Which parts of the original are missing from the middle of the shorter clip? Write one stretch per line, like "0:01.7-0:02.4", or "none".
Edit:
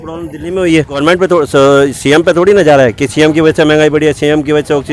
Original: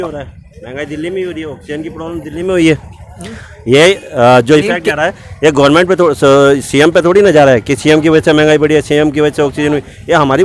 0:02.9-0:05.7